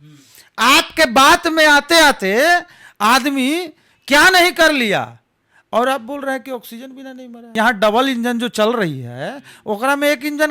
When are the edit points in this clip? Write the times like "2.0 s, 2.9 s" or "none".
7.5 s

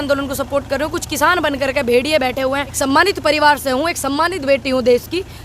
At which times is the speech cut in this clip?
2.8 s

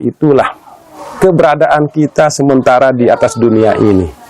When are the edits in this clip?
none

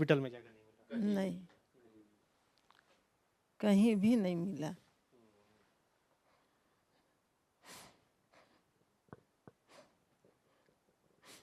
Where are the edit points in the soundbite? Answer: none

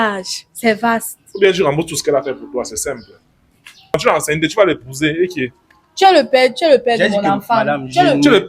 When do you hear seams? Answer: 3.9 s

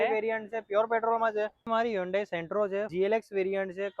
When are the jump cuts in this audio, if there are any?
1.7 s, 2.9 s

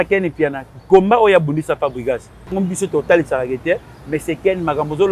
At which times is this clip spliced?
2.5 s

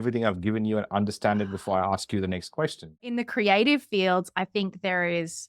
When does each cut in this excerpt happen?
3.1 s

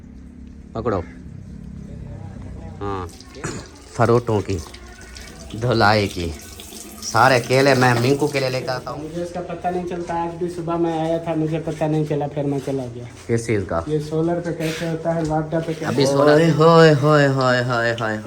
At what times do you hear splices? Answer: 3.2 s, 8.6 s, 16.1 s

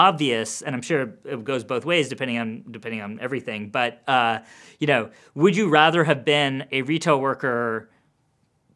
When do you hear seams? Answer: none

